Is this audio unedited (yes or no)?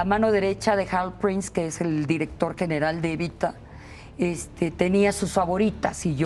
yes